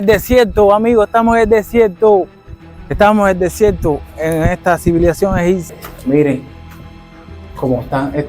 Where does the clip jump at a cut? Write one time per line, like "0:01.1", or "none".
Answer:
0:05.7

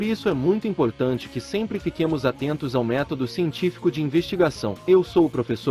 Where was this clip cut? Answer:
0:04.7

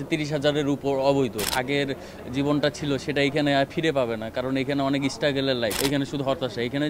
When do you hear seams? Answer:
0:01.5
0:05.8

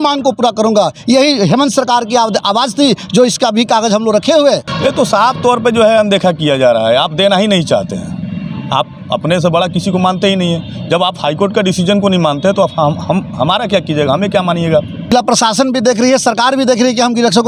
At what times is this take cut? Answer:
0:04.7
0:15.1

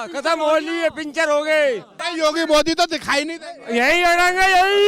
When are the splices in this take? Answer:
0:02.0

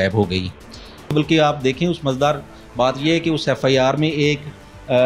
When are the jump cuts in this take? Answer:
0:01.1

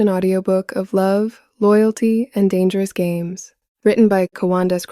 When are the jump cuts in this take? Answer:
0:03.6

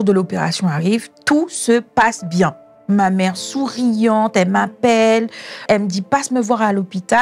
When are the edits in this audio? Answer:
0:02.7
0:05.7

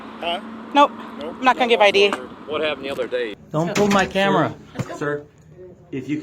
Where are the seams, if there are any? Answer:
0:03.4

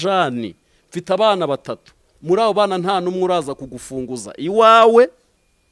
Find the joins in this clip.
none

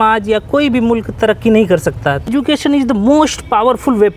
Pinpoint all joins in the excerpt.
0:02.3

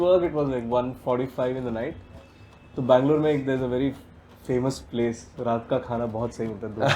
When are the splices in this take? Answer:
none

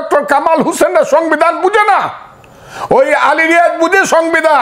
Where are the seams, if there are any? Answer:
none

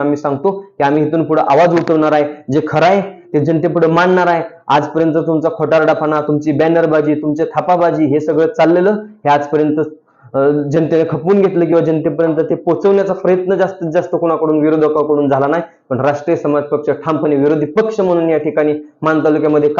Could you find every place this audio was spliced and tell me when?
none

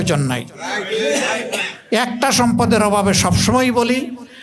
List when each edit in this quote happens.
0:01.7

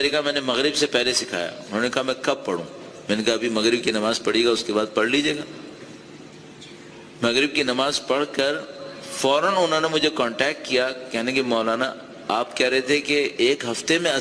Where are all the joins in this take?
none

